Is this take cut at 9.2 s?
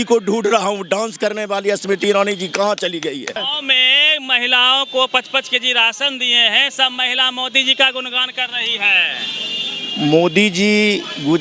no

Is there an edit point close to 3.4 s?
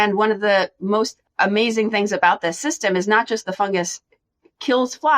no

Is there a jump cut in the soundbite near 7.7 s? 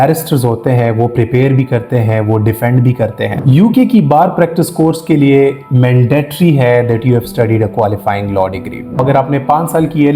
no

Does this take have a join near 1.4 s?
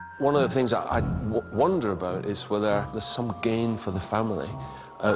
no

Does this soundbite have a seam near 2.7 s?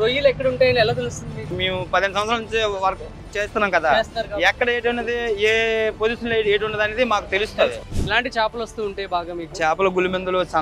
no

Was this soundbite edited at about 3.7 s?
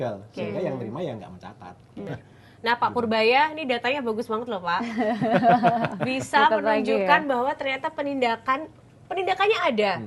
no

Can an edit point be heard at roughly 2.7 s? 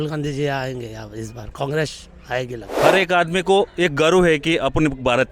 yes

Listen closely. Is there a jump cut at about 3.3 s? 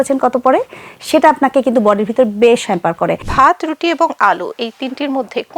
yes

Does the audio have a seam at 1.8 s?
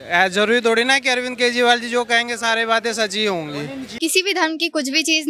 no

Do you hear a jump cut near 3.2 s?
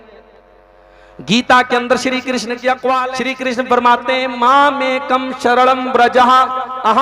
yes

